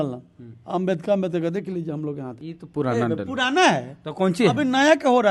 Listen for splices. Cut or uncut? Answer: cut